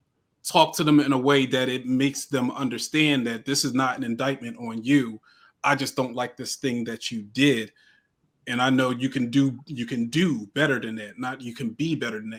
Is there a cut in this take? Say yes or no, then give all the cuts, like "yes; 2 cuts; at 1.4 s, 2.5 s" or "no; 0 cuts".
no; 0 cuts